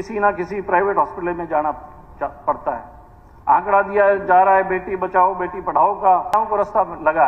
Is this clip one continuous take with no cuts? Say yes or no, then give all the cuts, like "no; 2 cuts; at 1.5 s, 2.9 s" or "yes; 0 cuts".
no; 1 cut; at 6.3 s